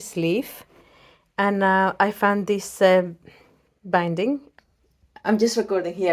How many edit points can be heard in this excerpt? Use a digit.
1